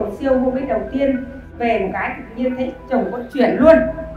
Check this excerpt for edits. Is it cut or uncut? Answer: cut